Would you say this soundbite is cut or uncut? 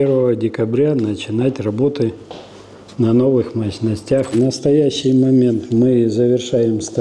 cut